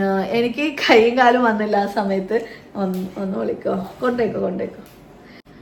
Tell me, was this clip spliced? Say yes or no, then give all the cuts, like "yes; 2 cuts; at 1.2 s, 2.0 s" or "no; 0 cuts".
no; 0 cuts